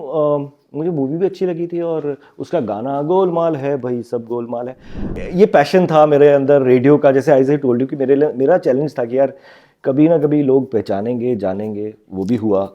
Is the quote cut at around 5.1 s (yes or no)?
yes